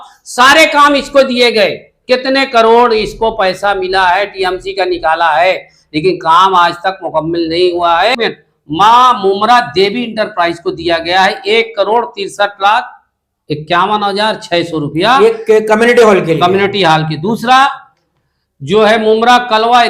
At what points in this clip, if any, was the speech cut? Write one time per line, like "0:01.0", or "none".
0:08.2